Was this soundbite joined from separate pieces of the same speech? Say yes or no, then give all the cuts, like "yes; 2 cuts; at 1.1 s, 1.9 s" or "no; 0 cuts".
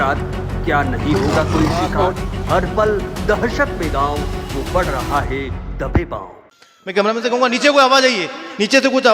yes; 1 cut; at 6.6 s